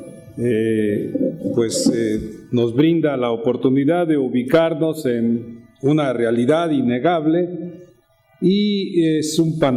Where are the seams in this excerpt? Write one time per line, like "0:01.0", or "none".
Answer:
none